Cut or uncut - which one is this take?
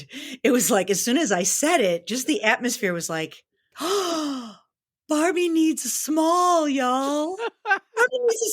cut